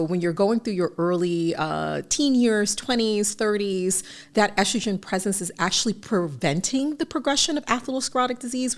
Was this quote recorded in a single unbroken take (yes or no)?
yes